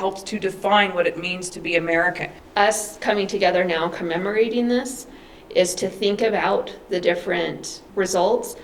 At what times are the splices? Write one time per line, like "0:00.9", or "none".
0:02.3
0:06.9
0:07.8